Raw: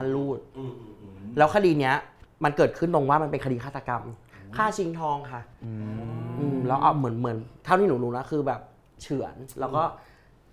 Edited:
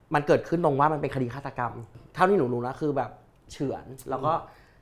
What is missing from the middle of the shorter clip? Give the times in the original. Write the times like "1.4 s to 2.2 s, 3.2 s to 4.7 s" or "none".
4.3 s to 7.5 s

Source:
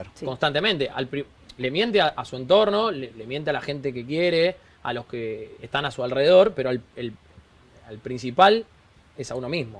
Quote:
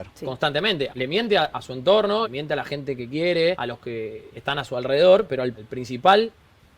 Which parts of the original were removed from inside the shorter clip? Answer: 0.9 s to 1.5 s, 2.9 s to 3.3 s, 4.6 s to 4.9 s, 7.0 s to 8.0 s

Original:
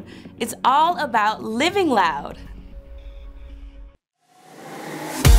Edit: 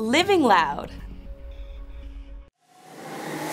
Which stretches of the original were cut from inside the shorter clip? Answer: 4.0 s to 4.2 s

